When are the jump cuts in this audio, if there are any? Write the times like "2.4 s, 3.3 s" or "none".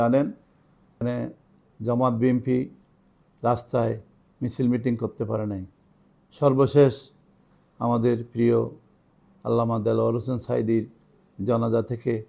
1.0 s

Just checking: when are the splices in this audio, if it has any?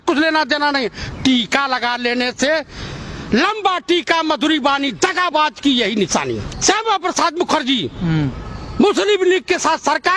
6.5 s

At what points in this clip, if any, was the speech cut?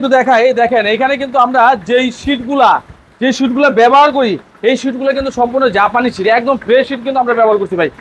none

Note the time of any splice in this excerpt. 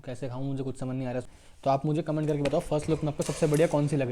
1.3 s

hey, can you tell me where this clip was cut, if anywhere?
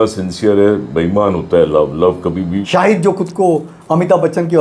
2.4 s

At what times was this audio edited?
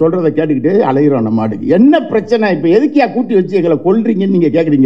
none

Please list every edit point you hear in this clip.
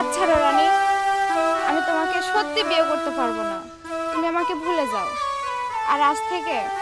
none

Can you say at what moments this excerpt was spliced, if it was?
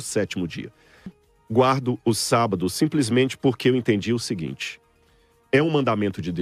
1.2 s

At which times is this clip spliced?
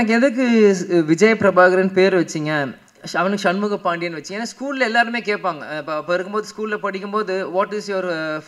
none

